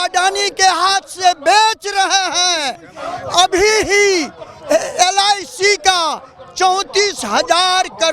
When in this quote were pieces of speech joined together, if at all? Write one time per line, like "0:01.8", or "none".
none

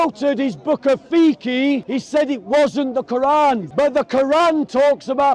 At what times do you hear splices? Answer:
0:01.9
0:03.7

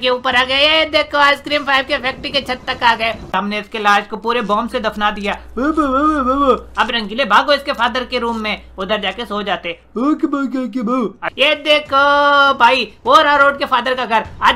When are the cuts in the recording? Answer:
0:03.3
0:11.2

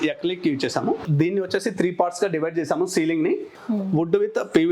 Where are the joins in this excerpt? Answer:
0:01.0
0:03.5

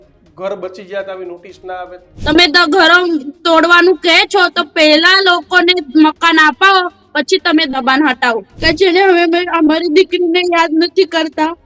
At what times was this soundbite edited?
0:02.1
0:08.5

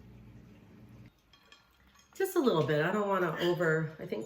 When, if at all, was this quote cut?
0:01.1

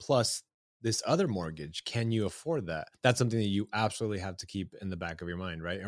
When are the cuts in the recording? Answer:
0:02.9

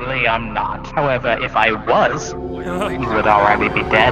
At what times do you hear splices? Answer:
none

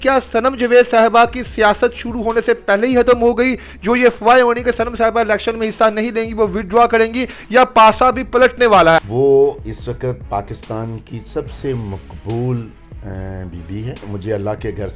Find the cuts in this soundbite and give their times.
0:09.0
0:14.1

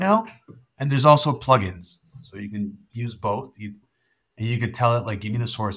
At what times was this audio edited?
0:03.9

